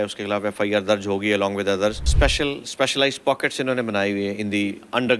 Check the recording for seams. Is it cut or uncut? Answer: cut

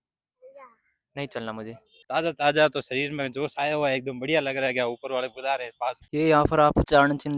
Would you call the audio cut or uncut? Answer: cut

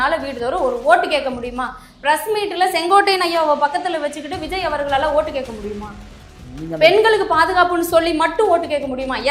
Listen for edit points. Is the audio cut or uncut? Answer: uncut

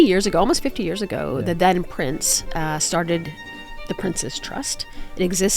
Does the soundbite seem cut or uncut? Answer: uncut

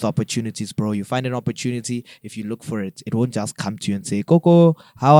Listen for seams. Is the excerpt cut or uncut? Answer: uncut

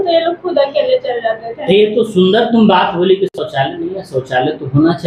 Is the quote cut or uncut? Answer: uncut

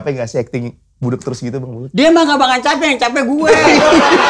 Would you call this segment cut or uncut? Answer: uncut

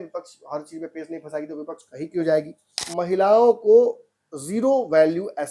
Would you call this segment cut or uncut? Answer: cut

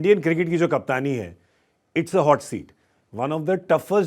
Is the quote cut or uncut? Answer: uncut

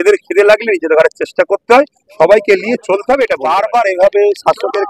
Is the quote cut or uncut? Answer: cut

